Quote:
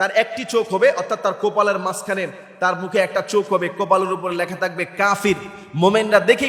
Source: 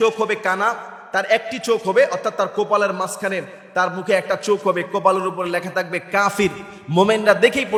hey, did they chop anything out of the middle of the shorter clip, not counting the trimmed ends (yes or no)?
no